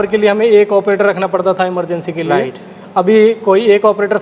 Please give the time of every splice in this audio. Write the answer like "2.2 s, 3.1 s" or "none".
none